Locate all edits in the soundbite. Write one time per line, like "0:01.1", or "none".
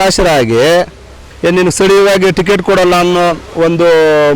0:01.3